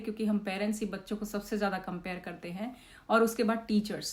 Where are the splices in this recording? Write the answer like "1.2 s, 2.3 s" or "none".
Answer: none